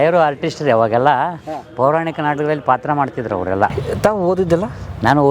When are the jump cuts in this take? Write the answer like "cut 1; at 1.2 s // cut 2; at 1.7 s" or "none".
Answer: cut 1; at 3.8 s

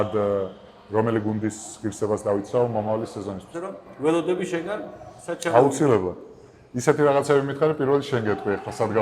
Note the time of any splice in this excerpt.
cut 1; at 3.7 s

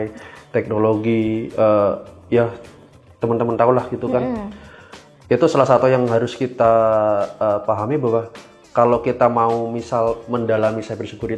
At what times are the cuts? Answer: none

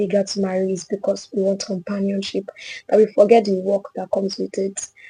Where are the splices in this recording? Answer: none

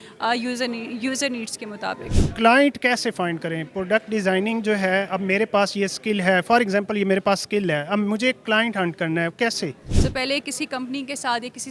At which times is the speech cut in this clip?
cut 1; at 2.1 s // cut 2; at 9.8 s

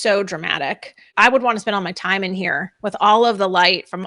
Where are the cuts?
cut 1; at 1.1 s

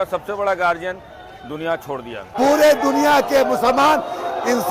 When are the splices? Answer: cut 1; at 2.3 s

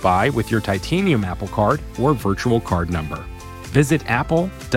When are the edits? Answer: none

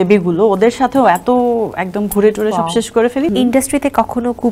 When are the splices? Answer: cut 1; at 3.3 s

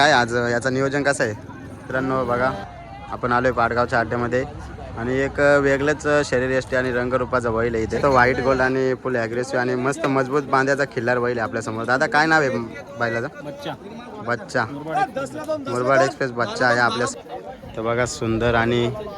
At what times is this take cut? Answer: cut 1; at 1.8 s // cut 2; at 8.0 s // cut 3; at 17.1 s

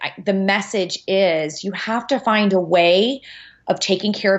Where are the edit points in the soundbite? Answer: none

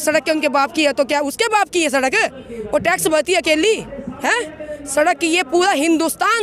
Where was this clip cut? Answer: none

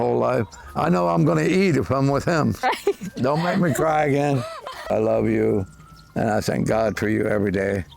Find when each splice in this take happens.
cut 1; at 2.6 s // cut 2; at 4.9 s

